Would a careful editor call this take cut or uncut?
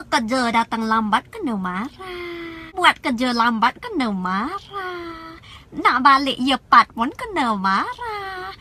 uncut